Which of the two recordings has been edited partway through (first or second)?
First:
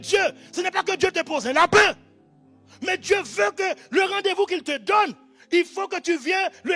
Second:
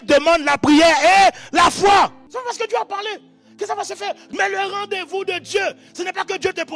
second